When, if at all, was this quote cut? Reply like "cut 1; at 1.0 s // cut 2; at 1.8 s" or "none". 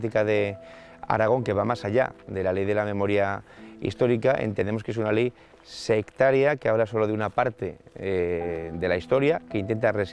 none